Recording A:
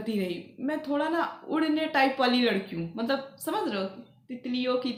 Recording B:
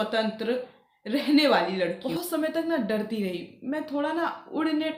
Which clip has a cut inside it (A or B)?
B